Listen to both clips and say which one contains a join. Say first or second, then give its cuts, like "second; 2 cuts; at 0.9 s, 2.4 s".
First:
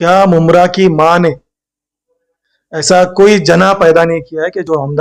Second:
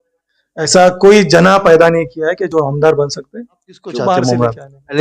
second; 1 cut; at 4.1 s